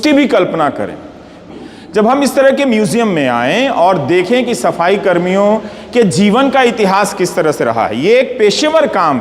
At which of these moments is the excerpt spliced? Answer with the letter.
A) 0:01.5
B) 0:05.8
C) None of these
A